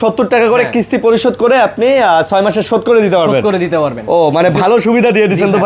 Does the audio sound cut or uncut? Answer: uncut